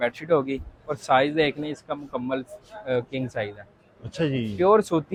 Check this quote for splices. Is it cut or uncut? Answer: uncut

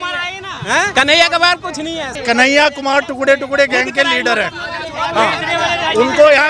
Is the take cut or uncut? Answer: cut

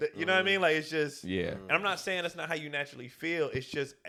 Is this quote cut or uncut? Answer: uncut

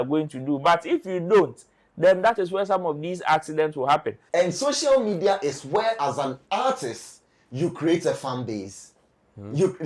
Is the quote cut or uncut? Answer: cut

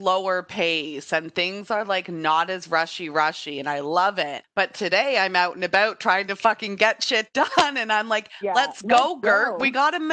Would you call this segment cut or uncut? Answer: cut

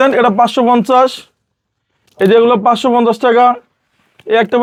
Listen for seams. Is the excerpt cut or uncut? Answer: uncut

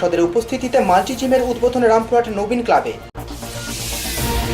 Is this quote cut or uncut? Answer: uncut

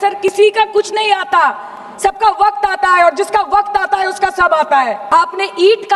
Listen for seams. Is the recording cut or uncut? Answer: cut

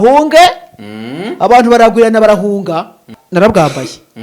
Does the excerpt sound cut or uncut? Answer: cut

